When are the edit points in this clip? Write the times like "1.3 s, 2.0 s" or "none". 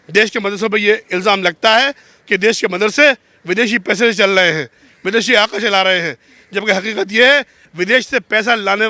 none